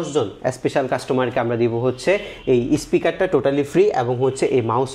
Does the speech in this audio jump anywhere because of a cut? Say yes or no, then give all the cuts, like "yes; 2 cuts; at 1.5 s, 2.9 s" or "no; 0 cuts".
no; 0 cuts